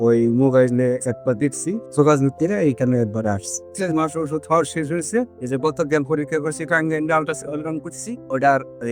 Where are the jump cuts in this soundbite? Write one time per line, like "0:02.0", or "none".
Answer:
0:01.8
0:03.7